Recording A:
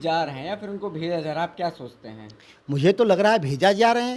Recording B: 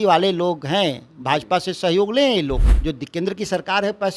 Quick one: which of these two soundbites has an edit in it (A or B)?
B